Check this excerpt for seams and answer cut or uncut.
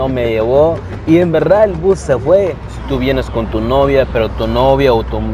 cut